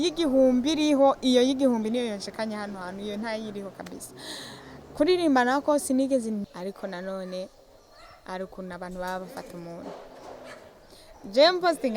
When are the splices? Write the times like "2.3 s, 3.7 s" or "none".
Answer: 6.4 s